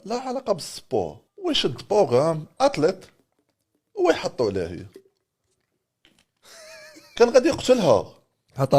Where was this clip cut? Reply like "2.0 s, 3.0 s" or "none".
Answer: 1.2 s